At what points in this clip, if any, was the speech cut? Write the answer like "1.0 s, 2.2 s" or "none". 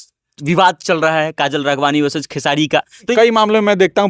3.1 s

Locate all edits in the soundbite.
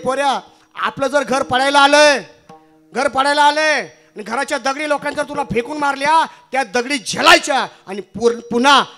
none

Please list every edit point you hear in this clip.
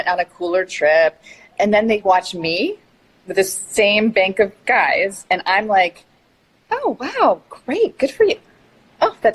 1.4 s

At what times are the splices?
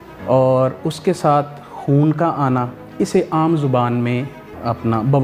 none

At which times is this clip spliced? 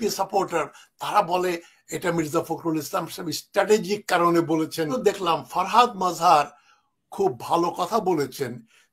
4.9 s

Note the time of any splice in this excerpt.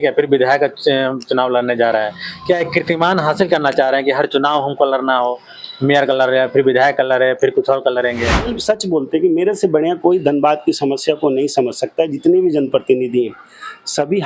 8.6 s

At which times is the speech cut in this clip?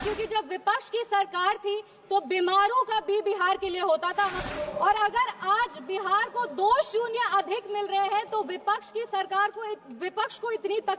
4.4 s

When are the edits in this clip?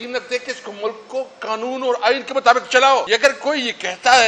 3.1 s

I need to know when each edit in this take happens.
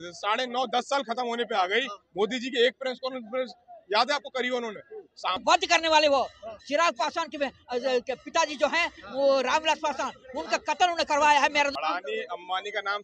5.4 s, 11.8 s

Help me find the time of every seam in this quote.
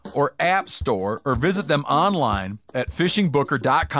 none

